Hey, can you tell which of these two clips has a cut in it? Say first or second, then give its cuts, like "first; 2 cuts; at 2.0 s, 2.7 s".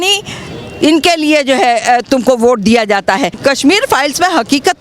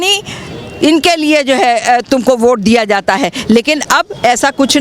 first; 1 cut; at 3.4 s